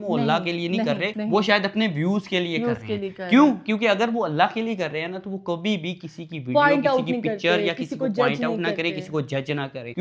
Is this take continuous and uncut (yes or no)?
yes